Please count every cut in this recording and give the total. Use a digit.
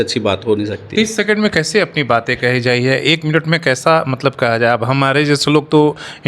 0